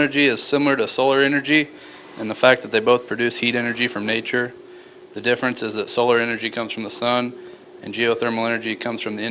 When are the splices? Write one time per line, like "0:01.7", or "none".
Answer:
0:05.8

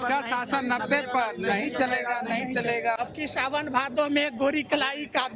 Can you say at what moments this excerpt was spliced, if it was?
0:03.0

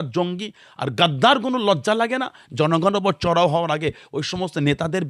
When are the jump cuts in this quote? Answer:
none

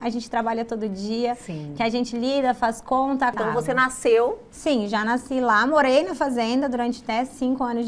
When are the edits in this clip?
0:03.4

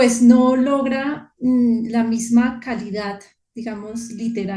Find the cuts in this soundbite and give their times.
none

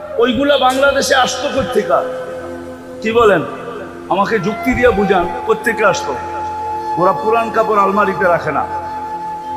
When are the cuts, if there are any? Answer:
0:08.7

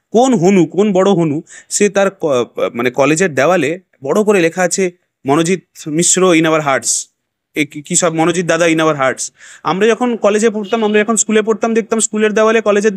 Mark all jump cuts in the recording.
none

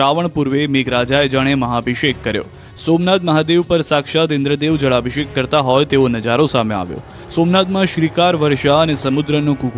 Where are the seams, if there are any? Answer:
0:08.3

